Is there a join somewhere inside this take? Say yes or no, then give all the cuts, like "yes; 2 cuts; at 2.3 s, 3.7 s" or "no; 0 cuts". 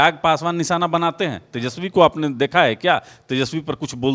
no; 0 cuts